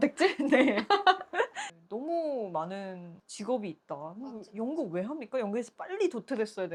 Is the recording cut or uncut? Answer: uncut